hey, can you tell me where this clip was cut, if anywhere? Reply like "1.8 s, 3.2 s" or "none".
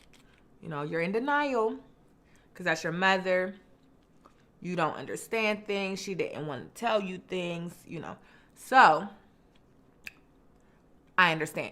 none